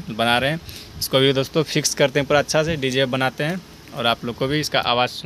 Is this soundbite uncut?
yes; 0 cuts

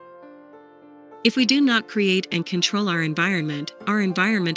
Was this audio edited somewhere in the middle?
yes; 1 cut; at 1.2 s

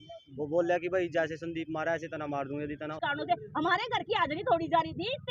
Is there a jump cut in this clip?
yes; 1 cut; at 2.9 s

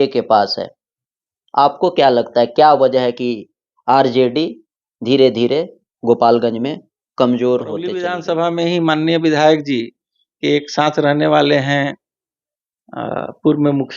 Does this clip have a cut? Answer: yes; 1 cut; at 8.1 s

